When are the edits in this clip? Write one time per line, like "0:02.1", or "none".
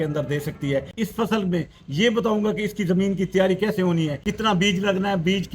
0:00.9
0:04.2